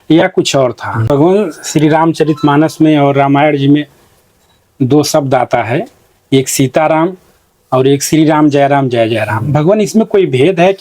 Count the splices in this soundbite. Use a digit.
1